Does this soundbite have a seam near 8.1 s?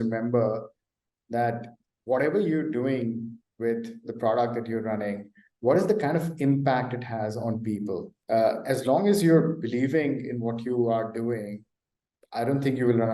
yes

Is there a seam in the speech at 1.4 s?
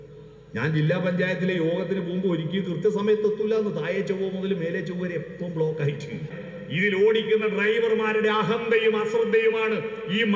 no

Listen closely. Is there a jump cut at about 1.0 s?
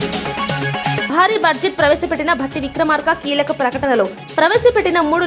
yes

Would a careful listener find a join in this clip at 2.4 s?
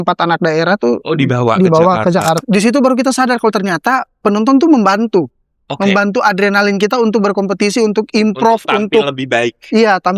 yes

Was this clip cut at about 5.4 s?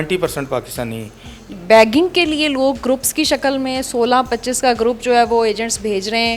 no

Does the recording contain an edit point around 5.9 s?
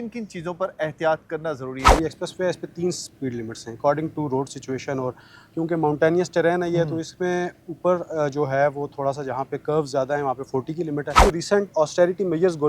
no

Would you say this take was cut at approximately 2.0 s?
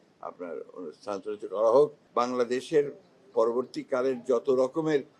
yes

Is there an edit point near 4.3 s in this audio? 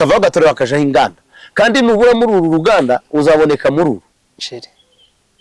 yes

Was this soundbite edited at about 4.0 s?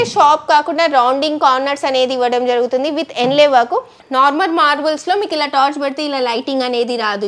yes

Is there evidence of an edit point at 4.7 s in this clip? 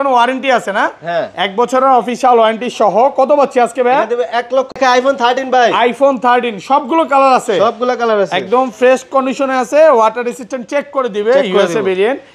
yes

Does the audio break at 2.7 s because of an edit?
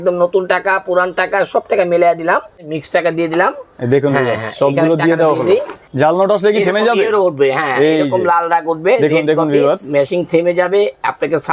yes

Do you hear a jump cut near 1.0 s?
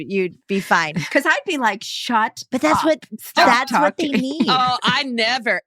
yes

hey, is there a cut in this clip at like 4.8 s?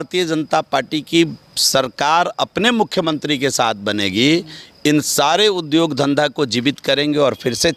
no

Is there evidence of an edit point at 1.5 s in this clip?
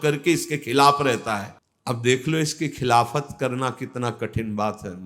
no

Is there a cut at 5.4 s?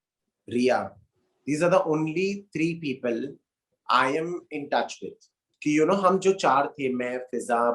yes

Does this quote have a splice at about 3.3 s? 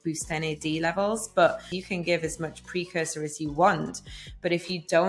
no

